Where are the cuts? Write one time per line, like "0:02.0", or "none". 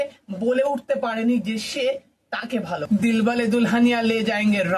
0:02.8